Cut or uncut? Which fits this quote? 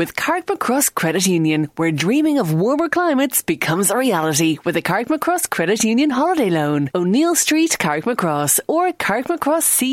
uncut